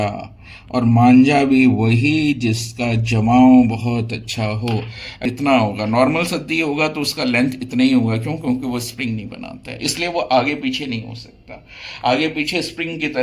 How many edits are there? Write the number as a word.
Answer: one